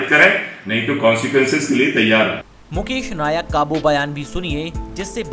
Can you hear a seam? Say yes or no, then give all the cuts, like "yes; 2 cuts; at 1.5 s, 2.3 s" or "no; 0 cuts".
no; 0 cuts